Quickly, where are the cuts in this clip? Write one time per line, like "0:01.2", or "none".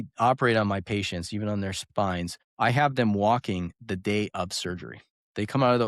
0:01.9

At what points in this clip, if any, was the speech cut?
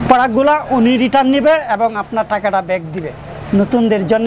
none

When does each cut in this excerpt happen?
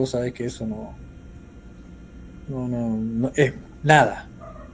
none

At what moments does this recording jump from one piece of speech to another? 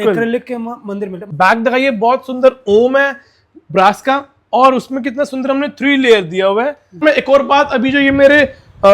0:01.2
0:07.0

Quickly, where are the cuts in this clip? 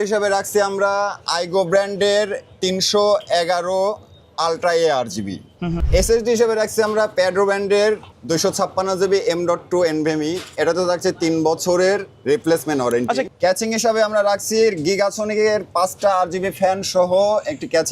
0:05.8
0:13.3

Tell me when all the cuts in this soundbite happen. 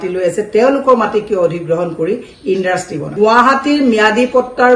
0:03.1

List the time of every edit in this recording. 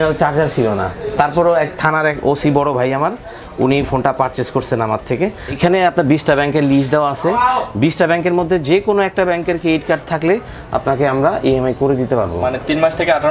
0:05.6

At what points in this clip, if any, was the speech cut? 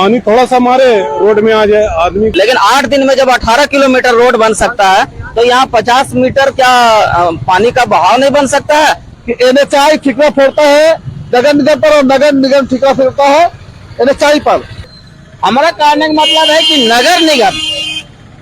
0:02.3
0:09.1
0:14.9

